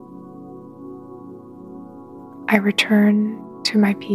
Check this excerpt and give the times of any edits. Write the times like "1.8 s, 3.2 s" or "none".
2.4 s